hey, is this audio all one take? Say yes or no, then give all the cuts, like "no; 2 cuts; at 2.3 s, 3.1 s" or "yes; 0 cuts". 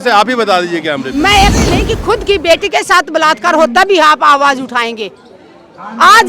no; 1 cut; at 1.5 s